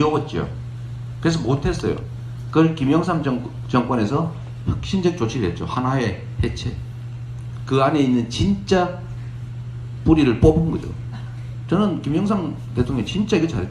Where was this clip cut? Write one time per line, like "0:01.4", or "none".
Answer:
none